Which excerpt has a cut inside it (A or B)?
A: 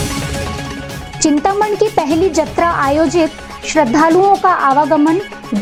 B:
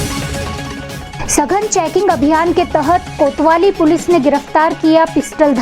B